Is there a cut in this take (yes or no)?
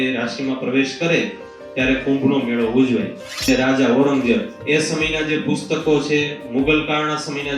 yes